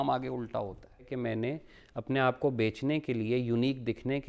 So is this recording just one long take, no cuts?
no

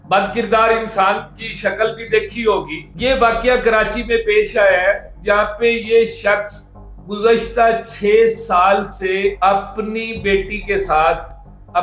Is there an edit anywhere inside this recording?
no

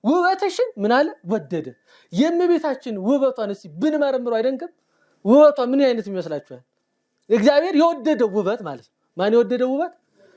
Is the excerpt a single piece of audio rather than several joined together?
yes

